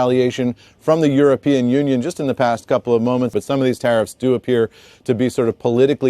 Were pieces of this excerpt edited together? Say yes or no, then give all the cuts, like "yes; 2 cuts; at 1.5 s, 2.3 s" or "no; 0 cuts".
yes; 1 cut; at 3.3 s